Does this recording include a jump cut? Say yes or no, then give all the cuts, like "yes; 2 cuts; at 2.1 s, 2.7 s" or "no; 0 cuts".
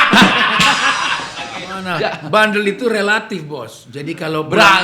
yes; 1 cut; at 1.8 s